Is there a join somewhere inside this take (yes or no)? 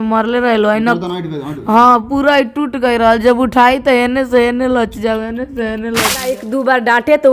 yes